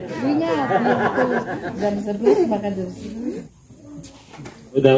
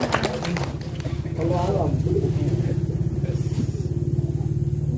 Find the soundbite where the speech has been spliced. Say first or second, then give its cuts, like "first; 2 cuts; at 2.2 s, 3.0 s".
first; 1 cut; at 3.5 s